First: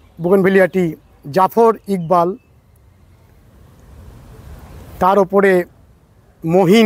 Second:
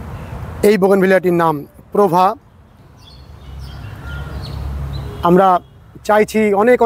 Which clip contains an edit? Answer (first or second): second